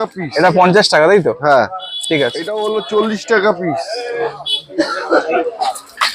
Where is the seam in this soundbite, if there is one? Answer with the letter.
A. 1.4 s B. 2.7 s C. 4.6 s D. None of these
B